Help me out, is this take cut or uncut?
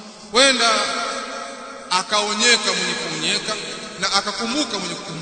cut